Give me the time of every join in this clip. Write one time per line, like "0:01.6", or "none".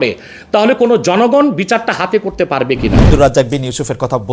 0:03.1